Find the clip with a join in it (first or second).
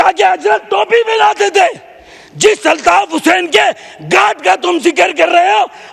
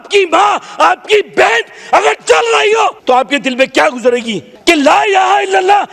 second